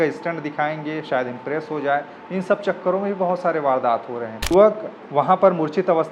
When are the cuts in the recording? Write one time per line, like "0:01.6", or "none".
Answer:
0:04.4